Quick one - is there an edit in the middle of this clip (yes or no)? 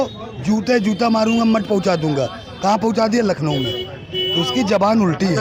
no